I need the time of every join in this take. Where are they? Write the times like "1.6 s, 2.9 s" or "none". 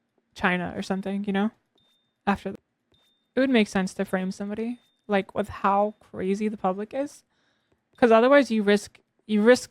2.5 s